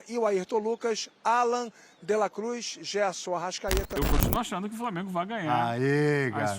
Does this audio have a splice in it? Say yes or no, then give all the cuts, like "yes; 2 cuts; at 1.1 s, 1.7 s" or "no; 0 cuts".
yes; 1 cut; at 4.0 s